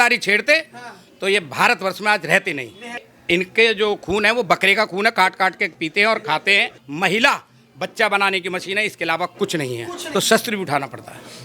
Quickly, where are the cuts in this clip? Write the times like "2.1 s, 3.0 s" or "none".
3.1 s, 6.8 s, 10.0 s